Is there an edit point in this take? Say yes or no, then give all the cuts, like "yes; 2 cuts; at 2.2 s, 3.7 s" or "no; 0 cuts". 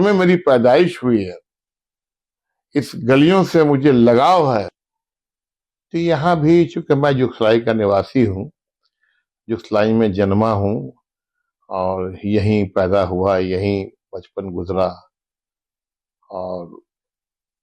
yes; 1 cut; at 4.7 s